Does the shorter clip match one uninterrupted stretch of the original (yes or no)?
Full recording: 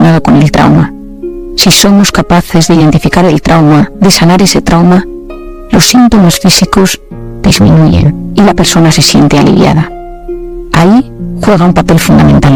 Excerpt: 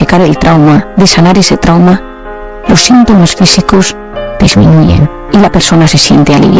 yes